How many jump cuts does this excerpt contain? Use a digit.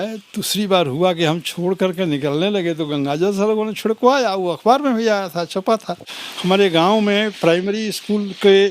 1